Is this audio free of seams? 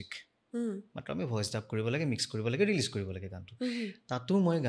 yes; 0 cuts

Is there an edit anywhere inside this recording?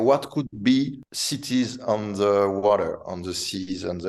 no; 0 cuts

